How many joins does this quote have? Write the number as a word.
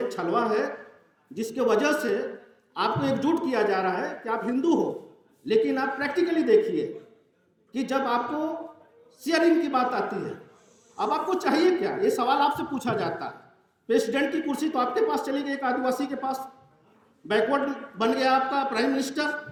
zero